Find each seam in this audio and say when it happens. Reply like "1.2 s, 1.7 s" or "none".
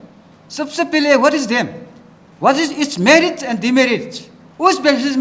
none

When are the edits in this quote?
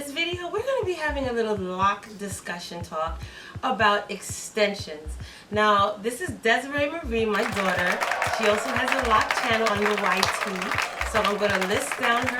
9.7 s

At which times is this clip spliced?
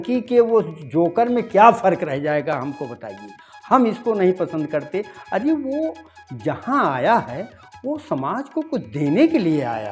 none

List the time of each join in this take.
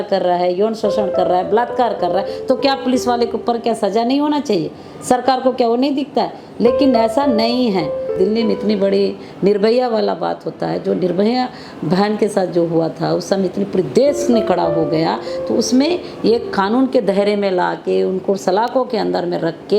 8.1 s

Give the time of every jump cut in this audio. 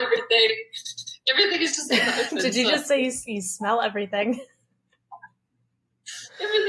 none

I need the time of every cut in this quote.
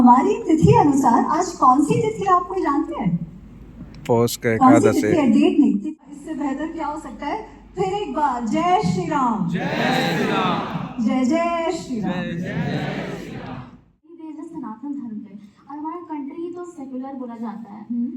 5.8 s, 14.2 s

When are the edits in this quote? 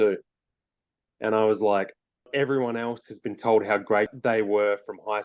2.3 s, 4.1 s

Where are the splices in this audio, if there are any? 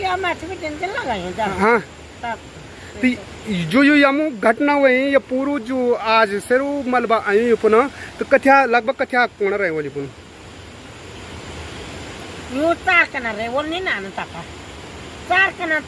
none

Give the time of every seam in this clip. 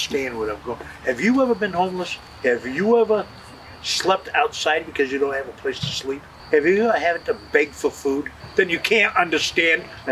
2.2 s, 6.3 s, 8.4 s

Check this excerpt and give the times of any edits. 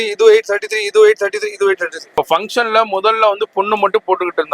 2.0 s

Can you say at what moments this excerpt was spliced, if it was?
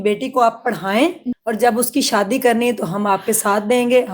1.3 s

